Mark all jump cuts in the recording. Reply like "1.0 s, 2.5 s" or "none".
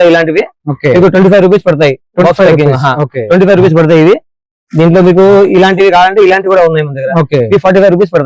none